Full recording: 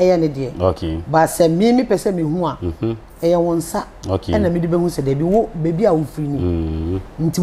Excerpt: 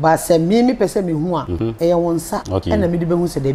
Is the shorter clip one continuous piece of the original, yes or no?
no